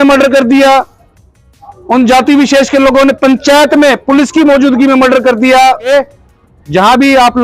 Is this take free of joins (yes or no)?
no